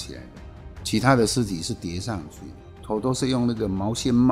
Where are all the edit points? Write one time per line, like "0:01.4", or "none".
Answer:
0:02.7